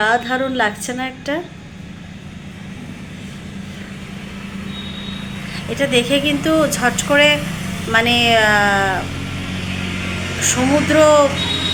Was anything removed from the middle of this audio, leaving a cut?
no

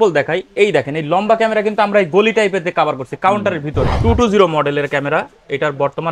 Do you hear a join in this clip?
yes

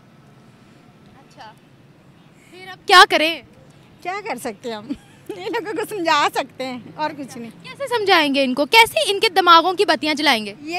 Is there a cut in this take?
no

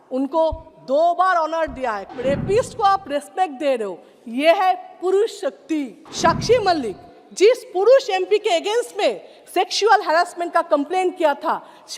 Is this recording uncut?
no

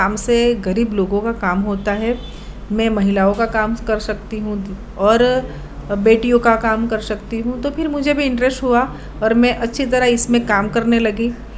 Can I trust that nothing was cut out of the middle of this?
yes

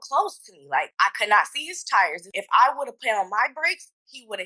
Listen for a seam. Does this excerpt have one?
yes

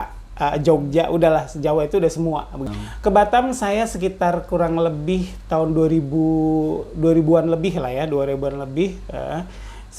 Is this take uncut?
no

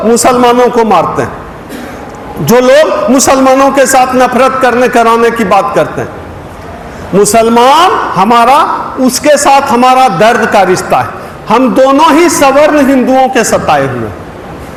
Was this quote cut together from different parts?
no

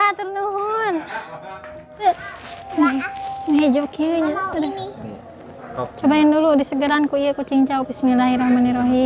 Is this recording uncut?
no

